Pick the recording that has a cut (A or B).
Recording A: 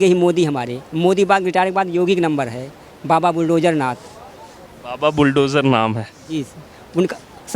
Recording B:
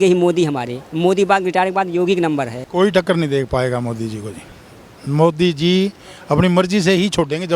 B